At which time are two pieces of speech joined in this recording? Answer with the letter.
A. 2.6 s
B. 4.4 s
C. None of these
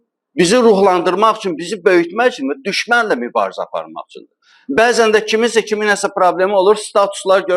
C